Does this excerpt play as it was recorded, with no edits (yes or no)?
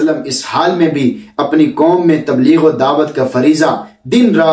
yes